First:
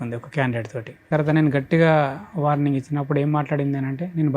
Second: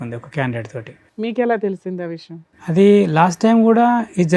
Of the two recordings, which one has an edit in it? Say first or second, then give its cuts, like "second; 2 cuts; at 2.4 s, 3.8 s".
first; 1 cut; at 1.1 s